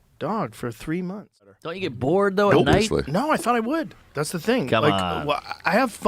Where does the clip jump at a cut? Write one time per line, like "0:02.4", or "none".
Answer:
0:01.6